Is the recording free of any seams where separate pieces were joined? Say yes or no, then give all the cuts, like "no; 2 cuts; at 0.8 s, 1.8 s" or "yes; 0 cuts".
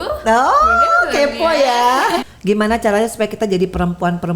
no; 1 cut; at 2.3 s